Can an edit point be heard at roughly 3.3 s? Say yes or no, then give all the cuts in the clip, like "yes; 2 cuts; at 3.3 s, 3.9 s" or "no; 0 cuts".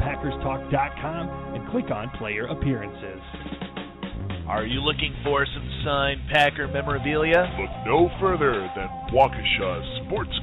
yes; 1 cut; at 3.3 s